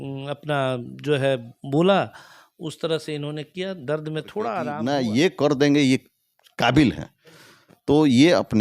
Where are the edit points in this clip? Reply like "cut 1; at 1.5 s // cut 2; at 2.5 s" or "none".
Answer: cut 1; at 4.7 s

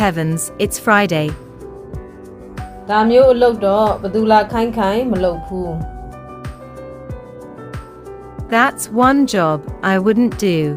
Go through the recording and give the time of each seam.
cut 1; at 1.4 s // cut 2; at 2.9 s // cut 3; at 6.0 s // cut 4; at 7.8 s

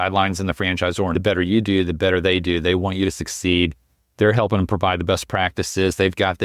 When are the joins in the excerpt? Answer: cut 1; at 1.1 s

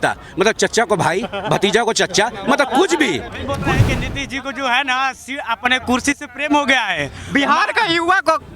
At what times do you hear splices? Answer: cut 1; at 3.6 s

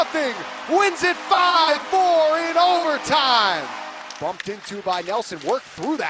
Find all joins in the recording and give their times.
cut 1; at 4.0 s

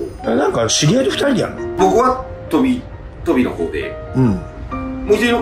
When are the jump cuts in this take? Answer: cut 1; at 1.6 s

